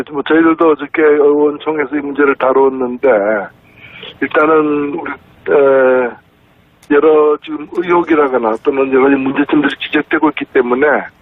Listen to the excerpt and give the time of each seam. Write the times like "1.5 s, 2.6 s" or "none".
0.9 s